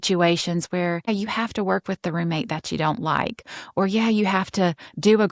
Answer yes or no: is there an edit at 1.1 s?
yes